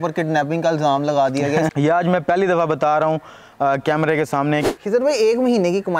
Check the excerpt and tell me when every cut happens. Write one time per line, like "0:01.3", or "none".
0:01.7
0:04.6